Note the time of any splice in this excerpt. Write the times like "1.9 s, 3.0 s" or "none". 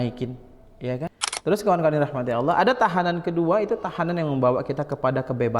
1.1 s